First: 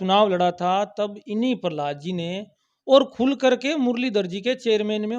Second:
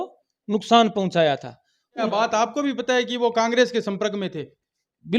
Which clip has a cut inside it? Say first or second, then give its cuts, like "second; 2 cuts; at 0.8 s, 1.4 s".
second; 1 cut; at 2.0 s